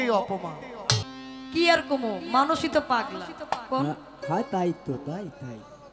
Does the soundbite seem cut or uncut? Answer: cut